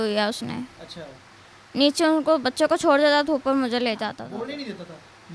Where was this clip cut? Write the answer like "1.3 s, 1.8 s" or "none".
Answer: 4.2 s